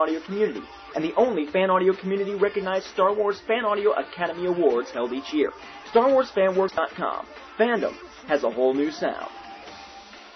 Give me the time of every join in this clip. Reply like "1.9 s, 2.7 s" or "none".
6.8 s

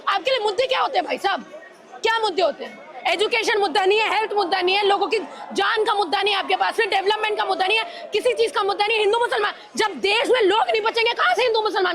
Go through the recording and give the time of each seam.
none

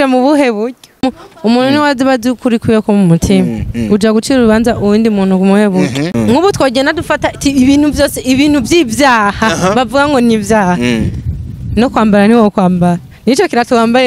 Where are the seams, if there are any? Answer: 1.0 s, 6.1 s

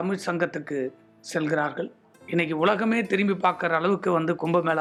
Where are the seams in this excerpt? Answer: none

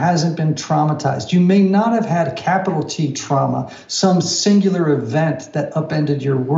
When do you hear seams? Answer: none

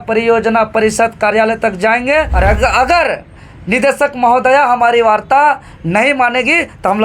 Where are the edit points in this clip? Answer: 2.3 s

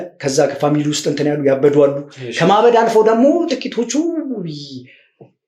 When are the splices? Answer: none

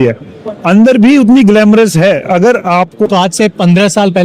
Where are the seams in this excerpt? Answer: 3.1 s

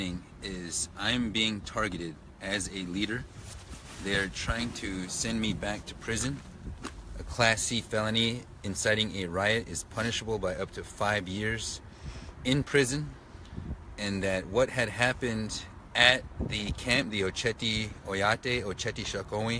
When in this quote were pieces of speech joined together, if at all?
none

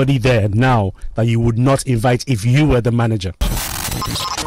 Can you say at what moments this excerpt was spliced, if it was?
3.4 s

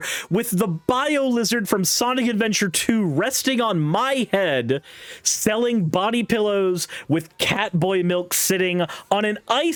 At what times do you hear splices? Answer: none

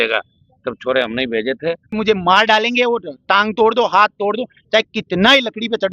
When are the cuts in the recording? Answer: 2.0 s

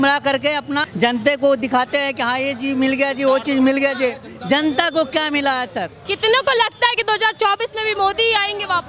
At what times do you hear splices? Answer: 0.9 s, 6.0 s

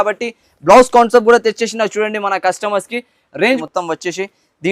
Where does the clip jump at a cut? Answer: 3.6 s

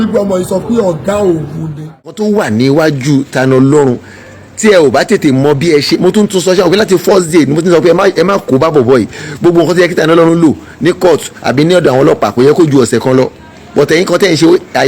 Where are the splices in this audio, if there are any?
2.2 s

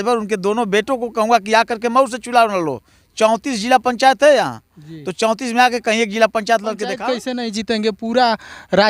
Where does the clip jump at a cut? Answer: 7.1 s

